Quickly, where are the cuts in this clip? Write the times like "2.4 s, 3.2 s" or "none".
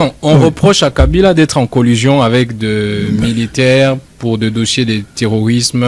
none